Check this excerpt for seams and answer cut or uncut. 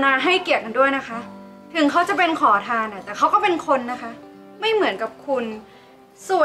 uncut